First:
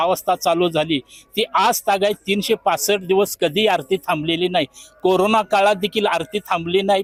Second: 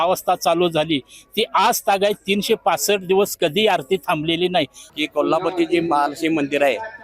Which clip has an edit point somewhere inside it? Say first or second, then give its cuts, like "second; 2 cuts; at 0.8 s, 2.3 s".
second; 1 cut; at 4.8 s